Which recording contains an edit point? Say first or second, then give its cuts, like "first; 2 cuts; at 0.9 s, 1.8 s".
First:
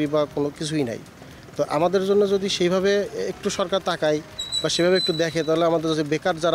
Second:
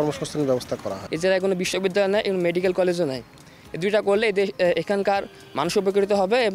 second; 1 cut; at 1.1 s